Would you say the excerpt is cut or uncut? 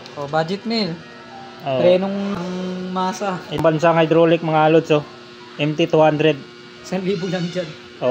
cut